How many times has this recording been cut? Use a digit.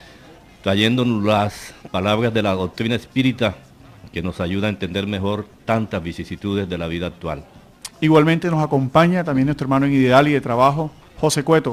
0